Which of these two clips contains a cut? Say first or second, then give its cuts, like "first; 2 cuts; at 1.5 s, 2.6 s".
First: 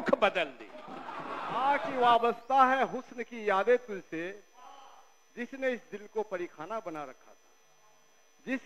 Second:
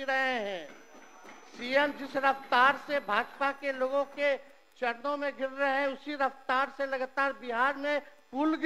first; 1 cut; at 1.6 s